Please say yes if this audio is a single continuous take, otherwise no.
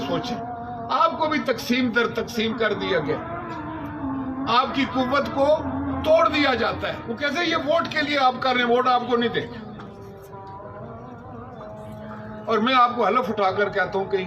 no